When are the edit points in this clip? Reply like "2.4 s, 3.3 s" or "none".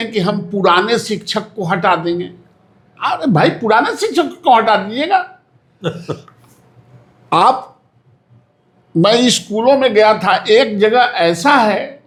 none